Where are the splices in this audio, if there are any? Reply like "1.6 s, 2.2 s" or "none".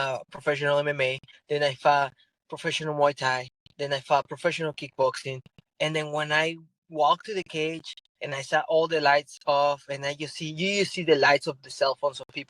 5.6 s